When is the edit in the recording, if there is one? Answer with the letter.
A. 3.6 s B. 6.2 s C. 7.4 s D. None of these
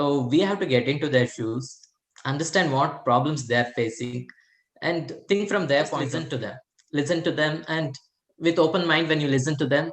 B